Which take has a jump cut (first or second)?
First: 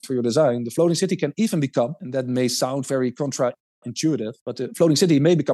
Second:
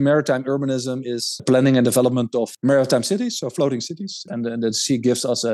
second